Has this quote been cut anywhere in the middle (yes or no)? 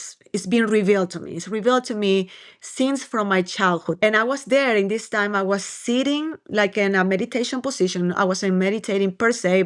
yes